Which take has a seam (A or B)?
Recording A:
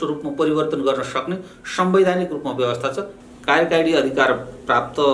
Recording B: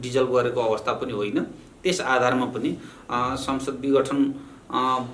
A